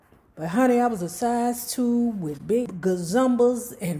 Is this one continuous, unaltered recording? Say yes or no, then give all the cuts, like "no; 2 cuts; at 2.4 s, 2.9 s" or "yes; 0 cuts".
no; 1 cut; at 2.6 s